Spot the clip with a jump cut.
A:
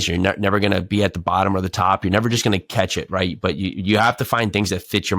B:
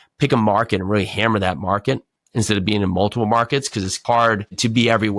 B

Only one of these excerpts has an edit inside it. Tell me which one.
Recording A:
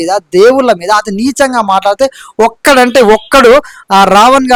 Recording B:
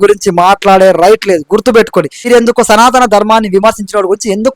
B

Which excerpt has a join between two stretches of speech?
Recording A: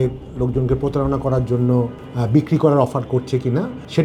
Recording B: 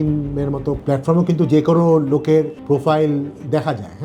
B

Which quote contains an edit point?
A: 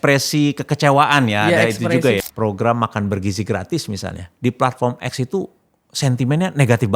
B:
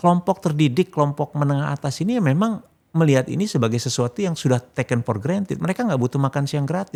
A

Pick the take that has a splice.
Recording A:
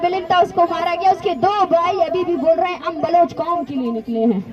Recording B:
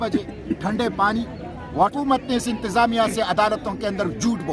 B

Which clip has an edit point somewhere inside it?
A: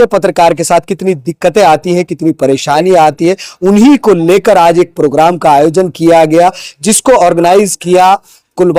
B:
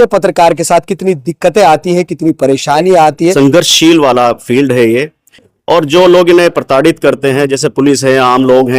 B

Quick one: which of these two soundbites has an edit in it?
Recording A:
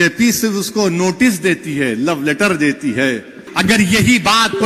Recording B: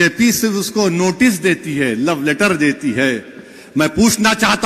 A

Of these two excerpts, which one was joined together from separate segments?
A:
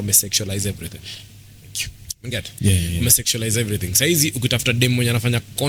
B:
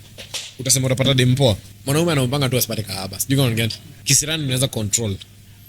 B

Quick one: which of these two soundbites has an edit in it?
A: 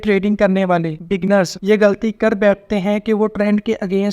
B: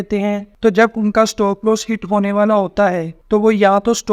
A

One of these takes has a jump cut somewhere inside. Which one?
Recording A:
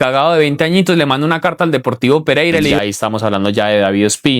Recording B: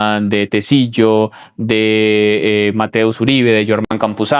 A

